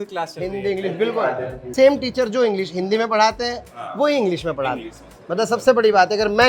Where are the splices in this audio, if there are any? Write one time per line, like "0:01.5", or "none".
0:01.5